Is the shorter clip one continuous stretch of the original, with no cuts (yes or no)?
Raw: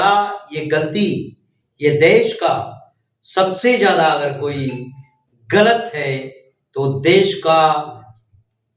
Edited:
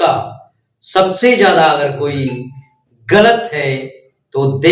yes